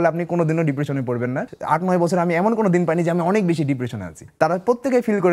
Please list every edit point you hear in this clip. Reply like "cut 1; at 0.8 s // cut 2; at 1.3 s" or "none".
cut 1; at 1.5 s // cut 2; at 4.2 s